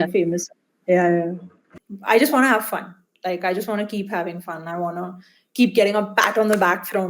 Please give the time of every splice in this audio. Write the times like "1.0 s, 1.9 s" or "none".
1.8 s